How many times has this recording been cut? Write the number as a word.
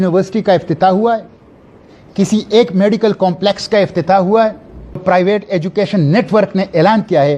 one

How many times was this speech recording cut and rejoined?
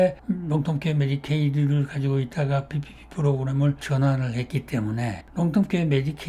one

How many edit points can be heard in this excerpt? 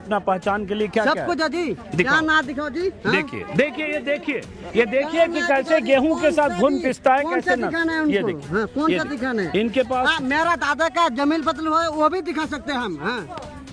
zero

